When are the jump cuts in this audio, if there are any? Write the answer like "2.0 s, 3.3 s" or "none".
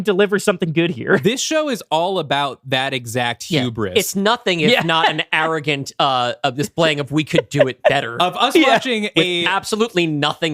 none

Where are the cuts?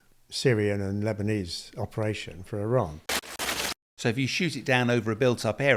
3.3 s

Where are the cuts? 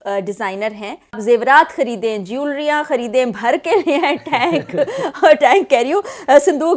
1.2 s

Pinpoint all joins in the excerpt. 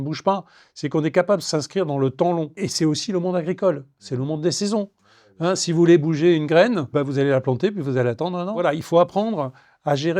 2.6 s, 6.9 s, 8.6 s

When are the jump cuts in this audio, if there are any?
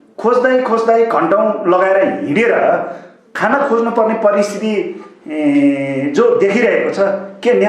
none

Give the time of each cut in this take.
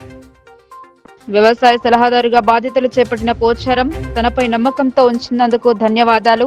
none

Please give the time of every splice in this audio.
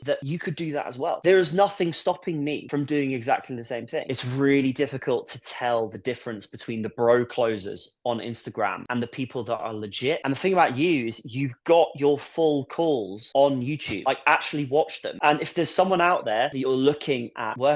4.1 s, 10.2 s

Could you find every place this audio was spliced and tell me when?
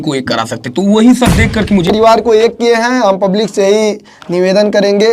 1.9 s

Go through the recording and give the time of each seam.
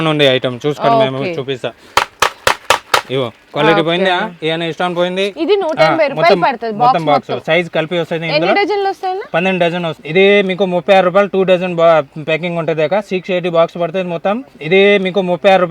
5.3 s, 10.0 s, 14.5 s

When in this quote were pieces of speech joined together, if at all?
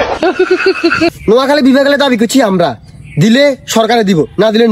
1.2 s

